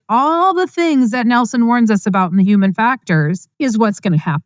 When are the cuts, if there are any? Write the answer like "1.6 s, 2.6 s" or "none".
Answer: 3.5 s